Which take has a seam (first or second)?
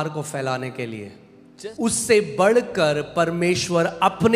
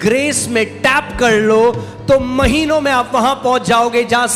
first